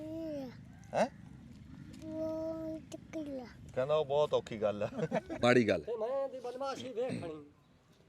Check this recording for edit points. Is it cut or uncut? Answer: cut